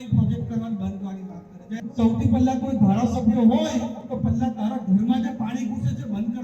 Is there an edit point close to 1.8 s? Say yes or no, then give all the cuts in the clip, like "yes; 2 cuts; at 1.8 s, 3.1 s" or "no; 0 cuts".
yes; 1 cut; at 1.8 s